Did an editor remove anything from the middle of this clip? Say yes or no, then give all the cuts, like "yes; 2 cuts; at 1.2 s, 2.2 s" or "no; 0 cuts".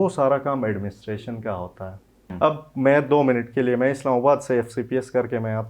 yes; 1 cut; at 2.2 s